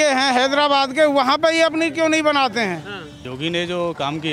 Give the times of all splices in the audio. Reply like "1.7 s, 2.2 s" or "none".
3.3 s